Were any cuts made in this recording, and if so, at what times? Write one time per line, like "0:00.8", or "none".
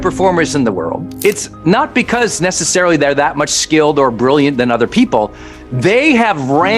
0:01.1

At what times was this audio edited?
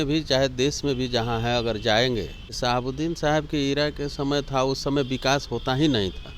0:02.6

